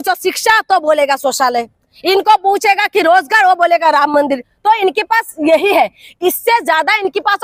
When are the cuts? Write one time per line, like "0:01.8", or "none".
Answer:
none

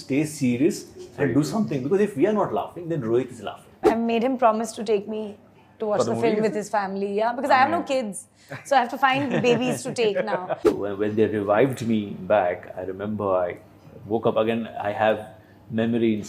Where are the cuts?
0:03.8
0:10.6

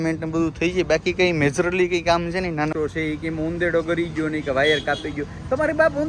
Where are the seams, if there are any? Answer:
0:02.7

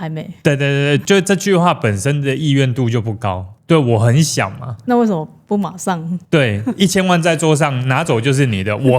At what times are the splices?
0:01.0
0:03.5

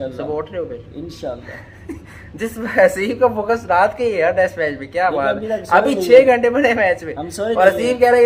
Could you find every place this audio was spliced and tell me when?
none

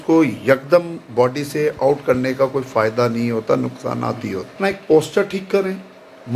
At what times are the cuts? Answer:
0:04.5

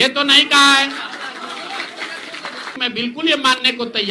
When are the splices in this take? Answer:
0:02.8

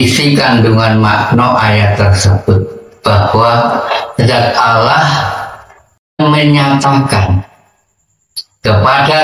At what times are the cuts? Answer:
0:06.2

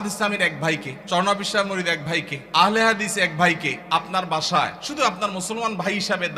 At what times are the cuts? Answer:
0:00.9
0:02.4
0:03.8
0:04.8

